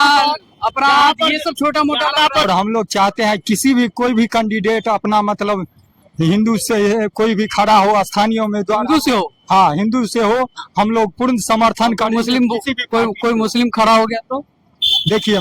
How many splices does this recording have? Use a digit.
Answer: 1